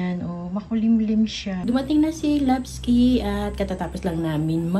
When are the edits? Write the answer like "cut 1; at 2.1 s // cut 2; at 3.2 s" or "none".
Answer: cut 1; at 1.5 s